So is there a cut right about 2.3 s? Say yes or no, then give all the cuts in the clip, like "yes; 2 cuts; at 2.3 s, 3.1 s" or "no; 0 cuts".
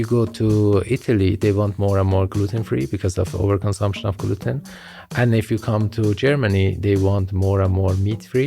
yes; 1 cut; at 2.3 s